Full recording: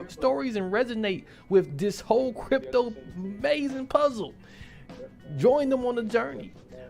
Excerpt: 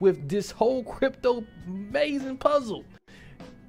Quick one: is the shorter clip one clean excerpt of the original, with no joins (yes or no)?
yes